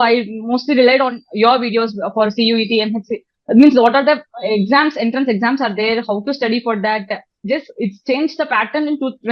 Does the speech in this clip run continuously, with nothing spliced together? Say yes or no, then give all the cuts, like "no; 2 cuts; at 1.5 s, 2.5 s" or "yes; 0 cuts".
no; 1 cut; at 7.4 s